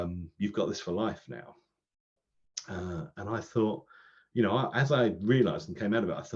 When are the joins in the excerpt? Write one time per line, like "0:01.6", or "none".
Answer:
none